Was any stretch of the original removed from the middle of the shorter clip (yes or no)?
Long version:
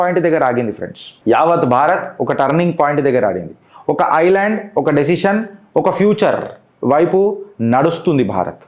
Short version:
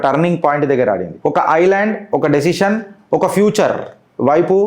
yes